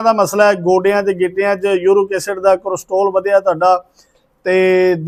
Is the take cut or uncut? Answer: uncut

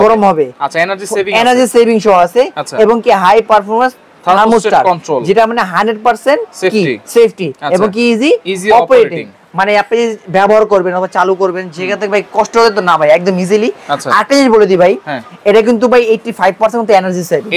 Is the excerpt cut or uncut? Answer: uncut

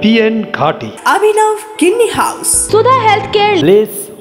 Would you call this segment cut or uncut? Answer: cut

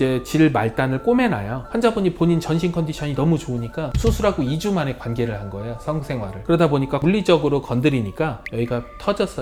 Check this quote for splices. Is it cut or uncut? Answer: uncut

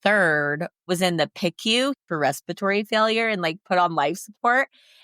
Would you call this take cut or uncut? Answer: cut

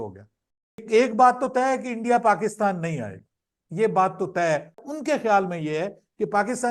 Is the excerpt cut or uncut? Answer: cut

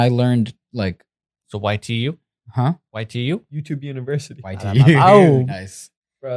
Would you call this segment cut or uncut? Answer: cut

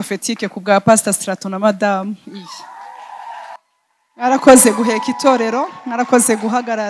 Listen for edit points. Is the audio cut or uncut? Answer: cut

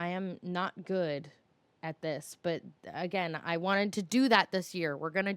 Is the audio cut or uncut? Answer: uncut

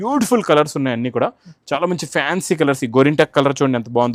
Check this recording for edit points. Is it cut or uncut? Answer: uncut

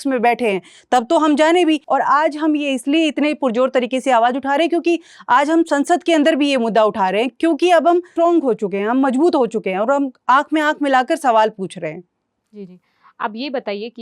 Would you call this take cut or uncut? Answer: uncut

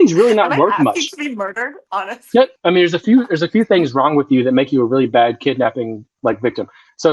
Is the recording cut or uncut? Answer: cut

